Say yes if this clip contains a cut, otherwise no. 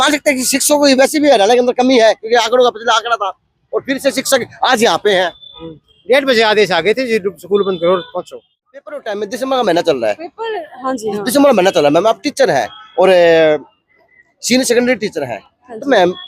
yes